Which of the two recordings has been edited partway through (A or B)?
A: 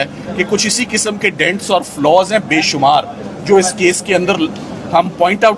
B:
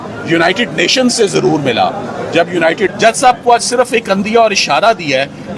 B